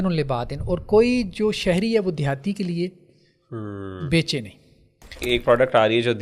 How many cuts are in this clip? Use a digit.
1